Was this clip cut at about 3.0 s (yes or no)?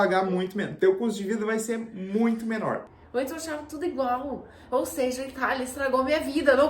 yes